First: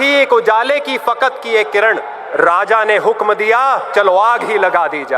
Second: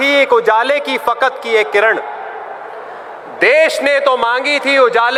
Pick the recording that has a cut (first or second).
first